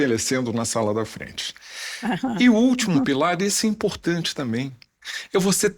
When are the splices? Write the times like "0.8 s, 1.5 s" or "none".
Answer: none